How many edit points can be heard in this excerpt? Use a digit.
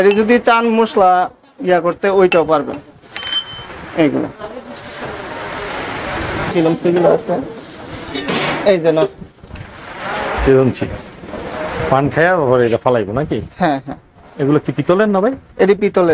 0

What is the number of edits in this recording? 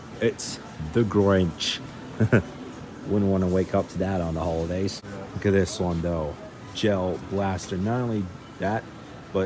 0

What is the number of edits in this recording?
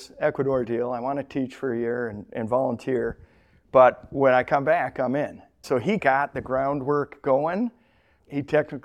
1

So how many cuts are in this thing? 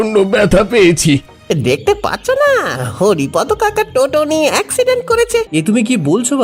2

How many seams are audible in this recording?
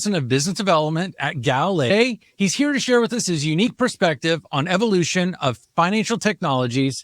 1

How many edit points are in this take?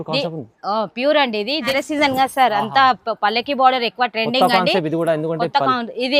1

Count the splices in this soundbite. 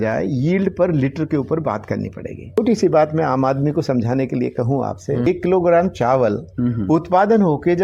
2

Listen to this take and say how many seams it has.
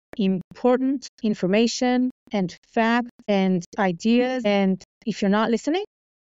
3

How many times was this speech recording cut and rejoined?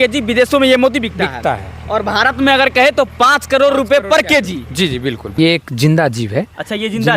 1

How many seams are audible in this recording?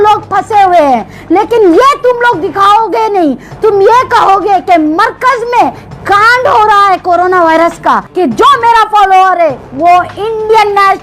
1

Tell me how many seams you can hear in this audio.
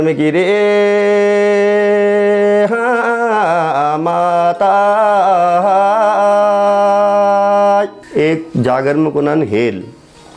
1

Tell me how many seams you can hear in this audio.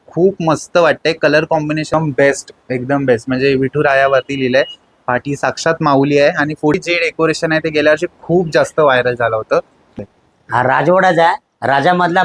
3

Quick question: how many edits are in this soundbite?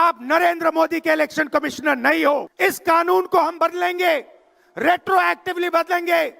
1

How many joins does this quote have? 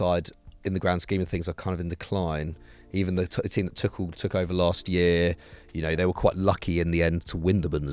0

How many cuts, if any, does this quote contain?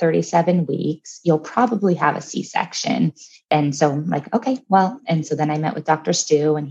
0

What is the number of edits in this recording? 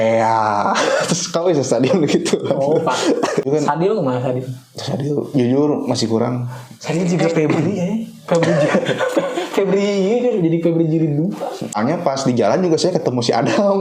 2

